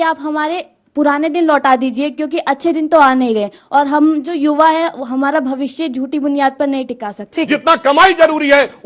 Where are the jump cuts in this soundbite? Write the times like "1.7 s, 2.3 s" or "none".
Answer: 7.5 s